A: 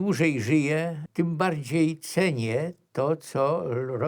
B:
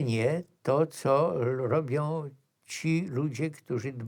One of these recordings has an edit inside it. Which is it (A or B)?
A